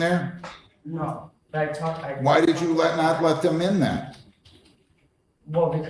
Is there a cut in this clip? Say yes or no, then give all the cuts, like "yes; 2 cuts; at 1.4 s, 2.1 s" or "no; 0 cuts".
no; 0 cuts